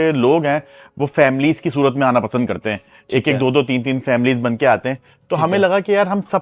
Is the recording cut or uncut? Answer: uncut